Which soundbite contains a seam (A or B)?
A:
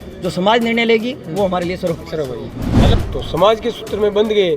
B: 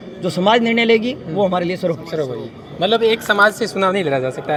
A